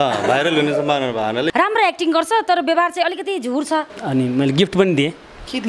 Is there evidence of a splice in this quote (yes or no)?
yes